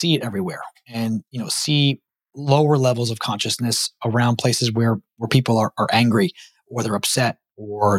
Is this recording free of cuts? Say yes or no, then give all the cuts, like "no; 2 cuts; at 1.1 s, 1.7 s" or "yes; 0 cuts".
yes; 0 cuts